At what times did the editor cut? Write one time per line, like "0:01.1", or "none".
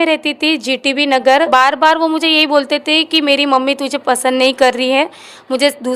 0:01.5